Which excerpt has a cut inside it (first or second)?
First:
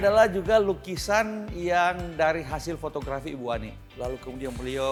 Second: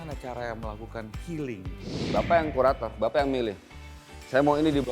second